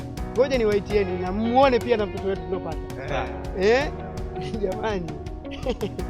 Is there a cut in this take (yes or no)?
no